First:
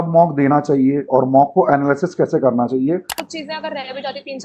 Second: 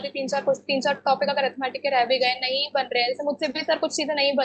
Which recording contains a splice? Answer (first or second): first